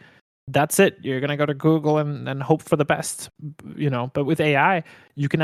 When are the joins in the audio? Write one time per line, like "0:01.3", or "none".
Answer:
none